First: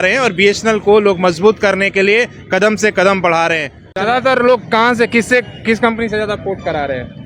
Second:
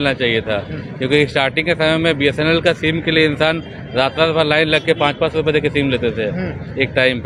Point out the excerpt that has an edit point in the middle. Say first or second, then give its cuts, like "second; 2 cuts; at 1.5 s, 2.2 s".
first; 1 cut; at 4.0 s